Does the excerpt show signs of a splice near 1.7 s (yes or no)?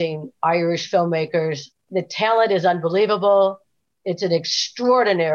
yes